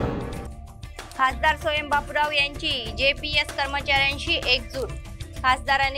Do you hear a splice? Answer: no; 0 cuts

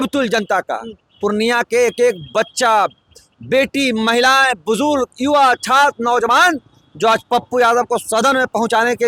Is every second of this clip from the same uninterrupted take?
yes; 0 cuts

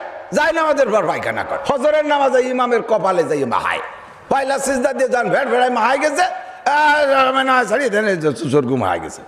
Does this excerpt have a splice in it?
yes; 1 cut; at 1.5 s

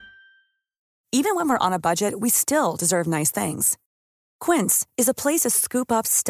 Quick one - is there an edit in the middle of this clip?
no; 0 cuts

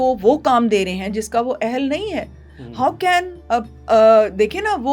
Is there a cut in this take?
no; 0 cuts

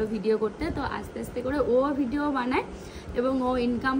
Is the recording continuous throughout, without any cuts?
yes; 0 cuts

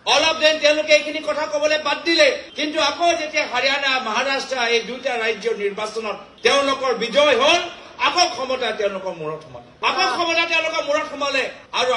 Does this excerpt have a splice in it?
no; 0 cuts

